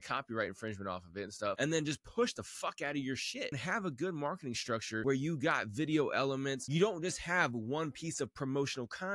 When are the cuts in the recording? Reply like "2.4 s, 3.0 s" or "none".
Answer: 1.6 s, 3.6 s, 5.0 s, 6.6 s